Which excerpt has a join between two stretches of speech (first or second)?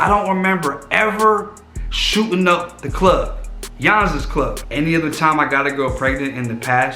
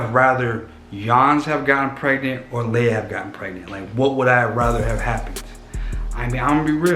first